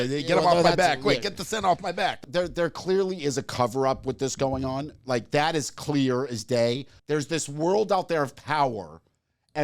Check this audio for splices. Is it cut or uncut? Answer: cut